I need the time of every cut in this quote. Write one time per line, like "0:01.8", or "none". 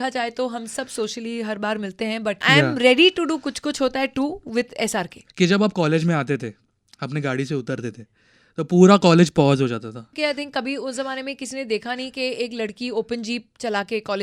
0:02.4
0:05.2
0:10.1